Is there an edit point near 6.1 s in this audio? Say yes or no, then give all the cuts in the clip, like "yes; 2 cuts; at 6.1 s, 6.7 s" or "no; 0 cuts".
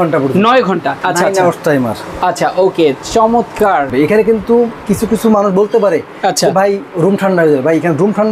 no; 2 cuts; at 1.0 s, 3.9 s